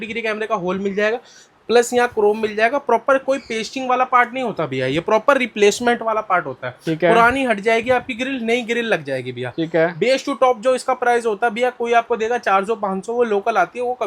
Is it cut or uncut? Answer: uncut